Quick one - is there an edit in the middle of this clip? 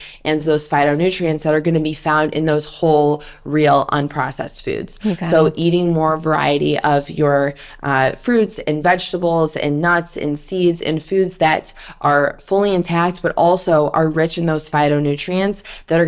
no; 0 cuts

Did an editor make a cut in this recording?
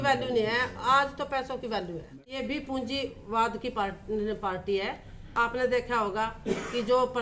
yes; 2 cuts; at 2.2 s, 5.5 s

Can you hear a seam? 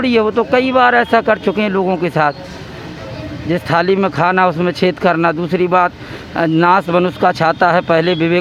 no; 0 cuts

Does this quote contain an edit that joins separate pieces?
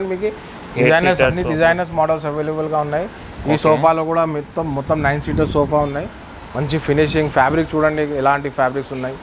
no; 0 cuts

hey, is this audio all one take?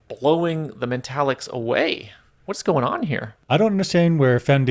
no; 1 cut; at 3.4 s

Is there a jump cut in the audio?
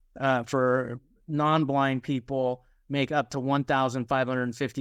no; 0 cuts

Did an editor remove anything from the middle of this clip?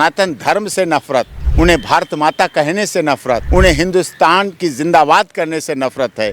yes; 2 cuts; at 1.4 s, 3.4 s

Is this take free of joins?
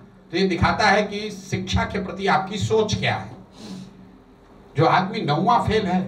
yes; 0 cuts

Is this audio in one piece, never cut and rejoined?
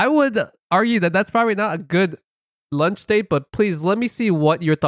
yes; 0 cuts

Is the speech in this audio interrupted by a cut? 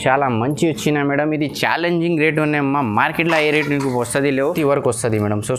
yes; 1 cut; at 4.5 s

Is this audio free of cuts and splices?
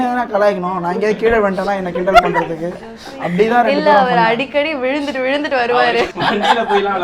no; 1 cut; at 6.1 s

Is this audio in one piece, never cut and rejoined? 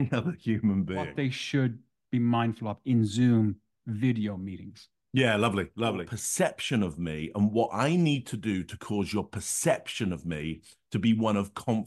no; 2 cuts; at 1.1 s, 6.2 s

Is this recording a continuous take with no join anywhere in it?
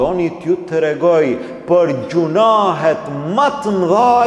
yes; 0 cuts

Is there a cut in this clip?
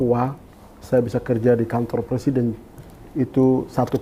no; 0 cuts

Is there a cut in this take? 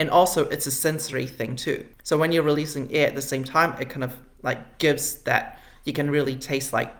no; 0 cuts

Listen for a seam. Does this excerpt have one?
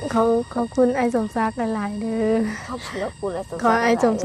no; 0 cuts

